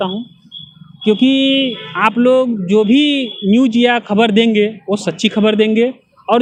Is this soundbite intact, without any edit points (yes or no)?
yes